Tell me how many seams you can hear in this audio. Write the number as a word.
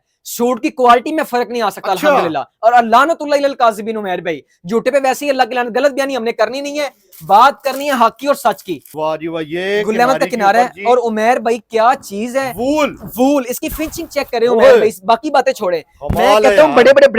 one